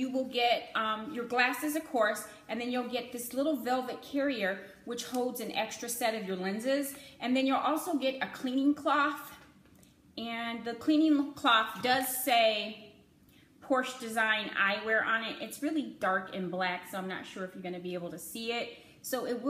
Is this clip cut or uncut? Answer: uncut